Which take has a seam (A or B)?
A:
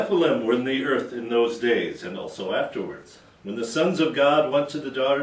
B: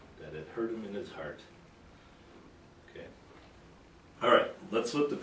A